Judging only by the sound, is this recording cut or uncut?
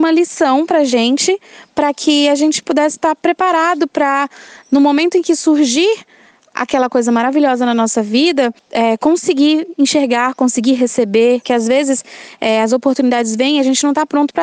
cut